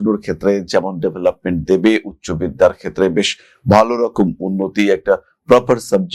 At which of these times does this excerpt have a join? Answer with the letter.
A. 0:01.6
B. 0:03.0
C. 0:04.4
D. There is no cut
D